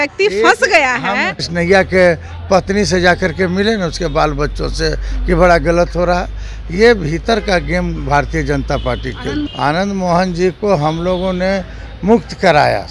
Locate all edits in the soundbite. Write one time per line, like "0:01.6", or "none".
0:01.4
0:09.5